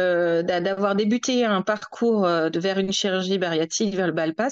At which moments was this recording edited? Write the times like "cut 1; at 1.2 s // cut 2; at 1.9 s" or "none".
none